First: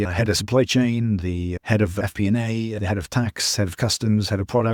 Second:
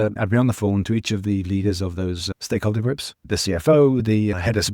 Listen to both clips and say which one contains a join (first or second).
second